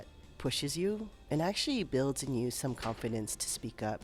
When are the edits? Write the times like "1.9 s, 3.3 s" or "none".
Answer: none